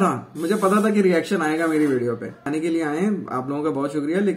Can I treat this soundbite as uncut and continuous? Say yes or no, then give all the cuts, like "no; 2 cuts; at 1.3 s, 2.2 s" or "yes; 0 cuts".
no; 1 cut; at 2.4 s